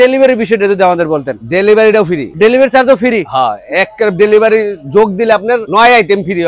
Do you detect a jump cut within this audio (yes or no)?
no